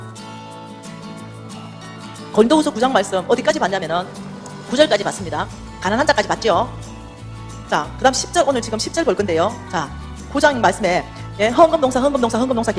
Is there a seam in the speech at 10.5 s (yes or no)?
yes